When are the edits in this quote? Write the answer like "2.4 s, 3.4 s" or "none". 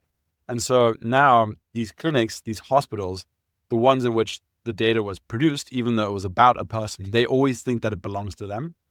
none